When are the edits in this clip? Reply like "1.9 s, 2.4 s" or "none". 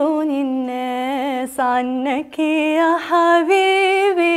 none